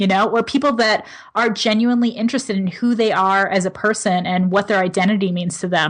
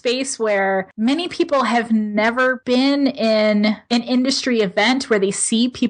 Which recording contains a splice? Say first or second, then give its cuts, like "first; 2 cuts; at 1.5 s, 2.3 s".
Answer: second; 3 cuts; at 0.9 s, 2.6 s, 3.8 s